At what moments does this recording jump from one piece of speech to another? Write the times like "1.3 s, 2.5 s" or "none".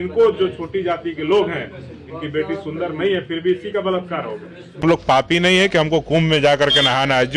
4.8 s